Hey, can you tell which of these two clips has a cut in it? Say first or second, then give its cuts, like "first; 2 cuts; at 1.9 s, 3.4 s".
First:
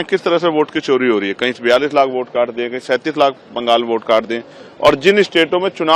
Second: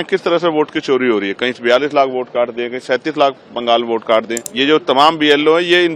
second; 1 cut; at 4.4 s